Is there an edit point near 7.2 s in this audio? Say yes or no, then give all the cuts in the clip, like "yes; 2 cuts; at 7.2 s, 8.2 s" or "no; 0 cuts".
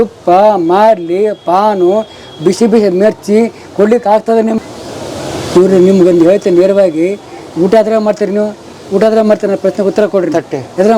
no; 1 cut; at 4.6 s